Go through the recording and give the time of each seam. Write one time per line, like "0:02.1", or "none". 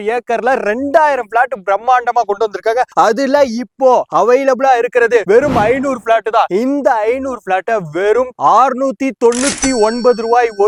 none